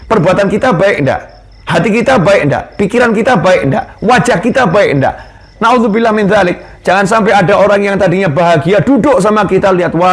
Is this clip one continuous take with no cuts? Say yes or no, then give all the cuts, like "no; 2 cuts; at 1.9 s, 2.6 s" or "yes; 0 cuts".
yes; 0 cuts